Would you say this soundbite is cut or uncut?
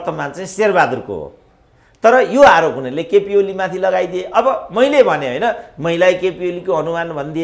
uncut